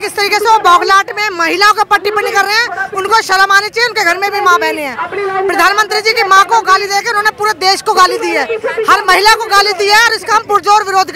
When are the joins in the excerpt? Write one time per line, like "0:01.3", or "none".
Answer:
none